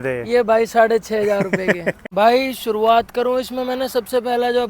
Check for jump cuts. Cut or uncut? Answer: cut